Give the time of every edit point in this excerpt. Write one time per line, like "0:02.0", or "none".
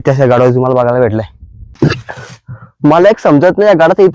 0:01.7